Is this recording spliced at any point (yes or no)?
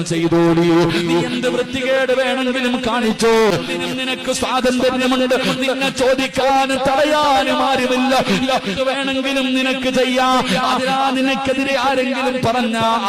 yes